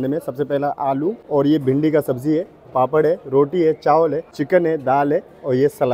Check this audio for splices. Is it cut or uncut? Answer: cut